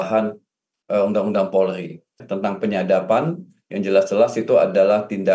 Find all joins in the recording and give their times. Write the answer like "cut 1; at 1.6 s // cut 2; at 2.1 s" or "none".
cut 1; at 2.3 s